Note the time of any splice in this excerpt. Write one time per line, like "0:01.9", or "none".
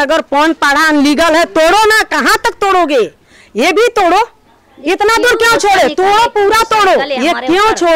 none